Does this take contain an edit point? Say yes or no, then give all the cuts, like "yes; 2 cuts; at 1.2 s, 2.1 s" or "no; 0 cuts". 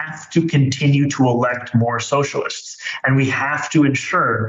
no; 0 cuts